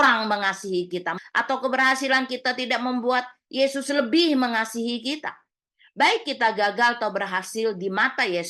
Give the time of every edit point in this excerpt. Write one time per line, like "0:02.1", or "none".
0:01.1